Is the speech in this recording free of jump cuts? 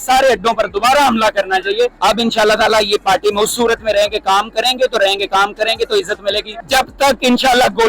no; 2 cuts; at 2.0 s, 6.5 s

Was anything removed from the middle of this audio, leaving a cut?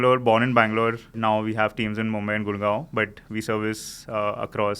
yes; 1 cut; at 1.1 s

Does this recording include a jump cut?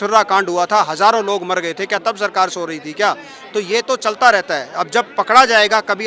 no; 0 cuts

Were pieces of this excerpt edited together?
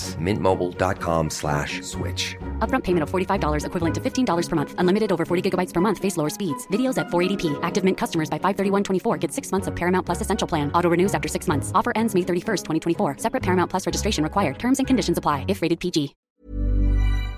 yes; 1 cut; at 16.2 s

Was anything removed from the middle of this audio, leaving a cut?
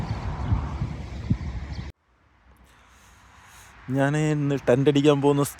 yes; 1 cut; at 1.9 s

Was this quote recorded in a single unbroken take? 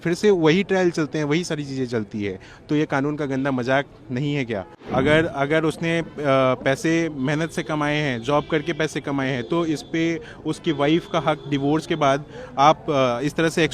no; 1 cut; at 4.8 s

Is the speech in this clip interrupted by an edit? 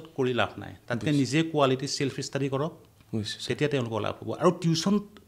no; 0 cuts

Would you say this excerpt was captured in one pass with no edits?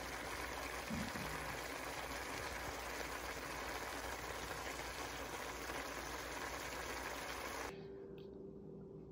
no; 1 cut; at 7.7 s

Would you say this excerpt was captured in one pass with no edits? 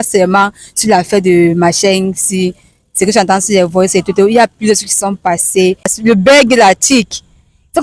no; 1 cut; at 6.0 s

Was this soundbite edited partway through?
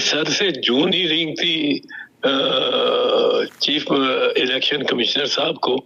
no; 0 cuts

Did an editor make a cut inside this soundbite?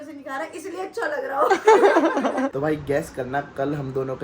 yes; 1 cut; at 2.5 s

